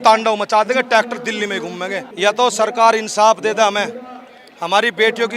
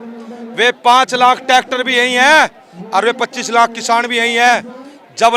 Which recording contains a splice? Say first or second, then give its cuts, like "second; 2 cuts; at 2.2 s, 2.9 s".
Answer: first; 1 cut; at 2.1 s